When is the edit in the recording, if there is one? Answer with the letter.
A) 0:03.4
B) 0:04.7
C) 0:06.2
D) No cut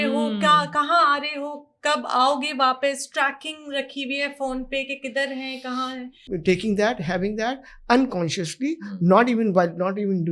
C